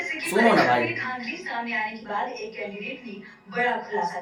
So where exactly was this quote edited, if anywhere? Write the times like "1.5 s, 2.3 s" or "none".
none